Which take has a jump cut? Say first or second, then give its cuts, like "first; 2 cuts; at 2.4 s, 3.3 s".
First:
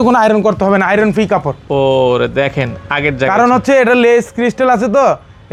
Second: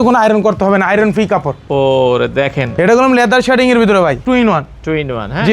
second; 2 cuts; at 2.7 s, 4.2 s